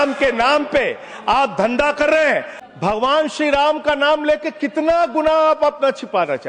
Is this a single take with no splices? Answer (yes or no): no